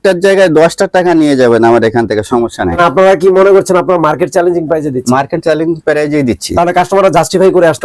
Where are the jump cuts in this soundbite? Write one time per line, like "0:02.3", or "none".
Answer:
0:02.8